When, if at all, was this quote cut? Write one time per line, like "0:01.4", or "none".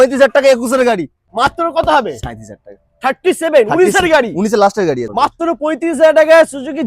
0:01.2
0:05.0